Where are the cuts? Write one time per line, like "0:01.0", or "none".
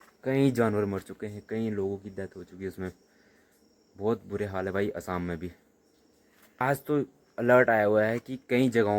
0:06.6